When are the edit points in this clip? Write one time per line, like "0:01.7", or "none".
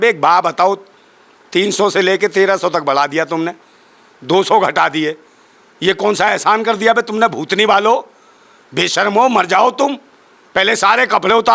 none

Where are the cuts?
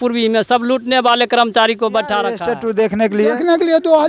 0:02.5

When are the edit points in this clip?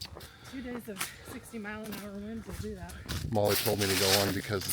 0:03.0

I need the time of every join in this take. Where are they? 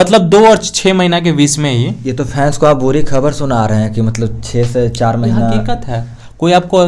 none

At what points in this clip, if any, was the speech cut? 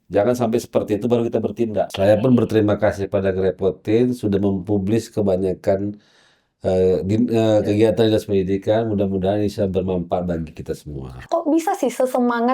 0:01.9
0:11.2

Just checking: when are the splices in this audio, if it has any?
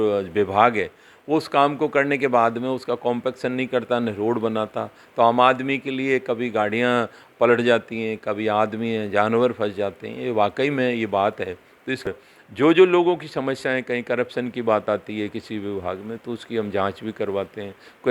0:12.1

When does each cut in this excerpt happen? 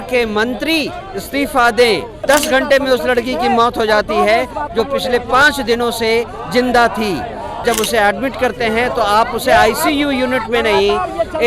0:02.2
0:07.6

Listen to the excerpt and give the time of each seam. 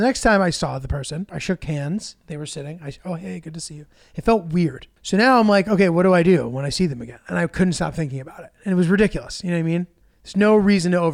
0:01.3
0:04.9

